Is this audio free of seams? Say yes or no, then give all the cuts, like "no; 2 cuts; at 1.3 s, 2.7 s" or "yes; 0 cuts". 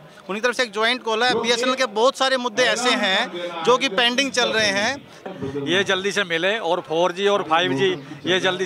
no; 1 cut; at 5.3 s